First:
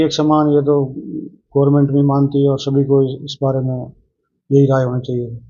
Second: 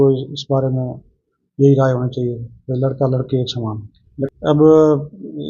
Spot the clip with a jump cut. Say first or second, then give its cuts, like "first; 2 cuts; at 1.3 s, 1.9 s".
second; 1 cut; at 4.3 s